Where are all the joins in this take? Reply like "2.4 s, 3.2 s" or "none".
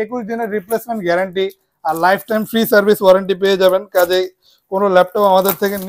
none